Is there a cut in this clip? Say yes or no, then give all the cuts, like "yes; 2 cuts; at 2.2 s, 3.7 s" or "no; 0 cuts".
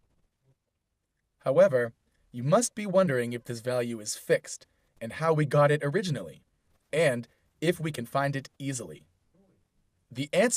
yes; 1 cut; at 5.4 s